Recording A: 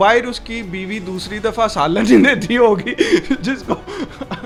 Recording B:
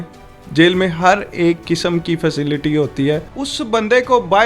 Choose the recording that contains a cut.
B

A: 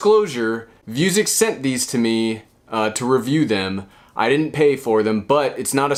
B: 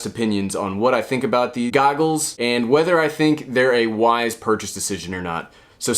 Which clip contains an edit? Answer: B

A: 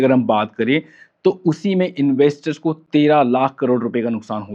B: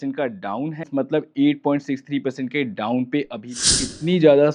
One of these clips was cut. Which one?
B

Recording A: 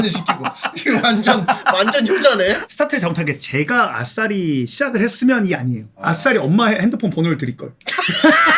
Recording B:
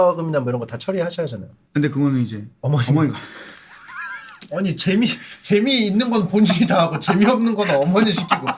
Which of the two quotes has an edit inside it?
A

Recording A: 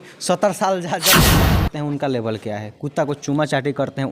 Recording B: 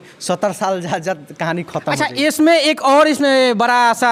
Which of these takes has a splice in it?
A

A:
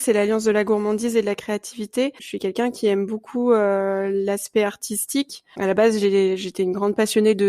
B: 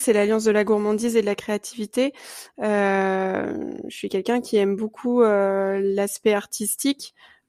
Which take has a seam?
A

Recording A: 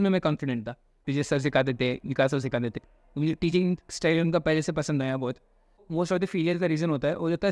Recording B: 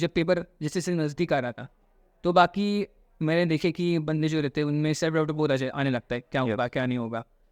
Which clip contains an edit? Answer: A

